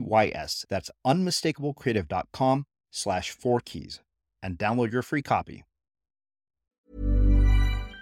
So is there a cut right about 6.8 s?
yes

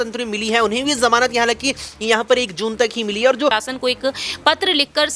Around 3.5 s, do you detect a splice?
yes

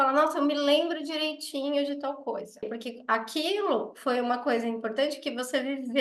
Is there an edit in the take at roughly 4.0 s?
no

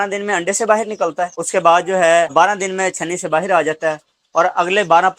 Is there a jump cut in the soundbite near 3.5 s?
no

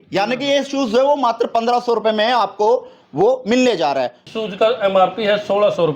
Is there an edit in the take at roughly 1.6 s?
no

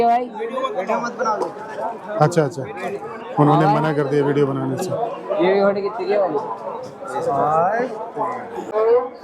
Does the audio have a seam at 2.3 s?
no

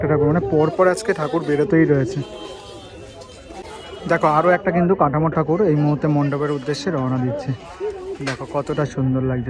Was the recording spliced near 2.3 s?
no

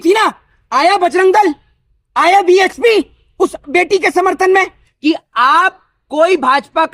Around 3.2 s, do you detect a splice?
no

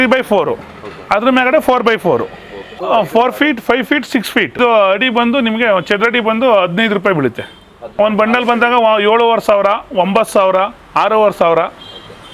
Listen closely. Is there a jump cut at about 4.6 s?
yes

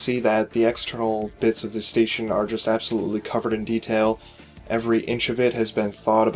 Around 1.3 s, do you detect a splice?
yes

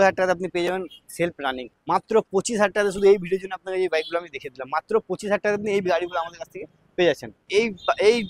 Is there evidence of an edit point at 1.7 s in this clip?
yes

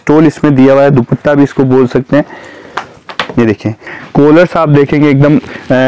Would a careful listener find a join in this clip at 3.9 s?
yes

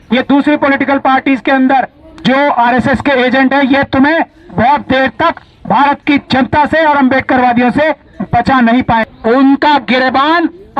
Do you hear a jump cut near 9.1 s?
yes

